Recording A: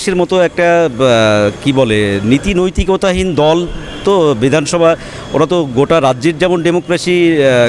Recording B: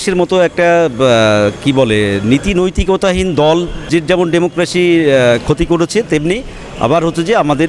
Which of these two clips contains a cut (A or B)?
B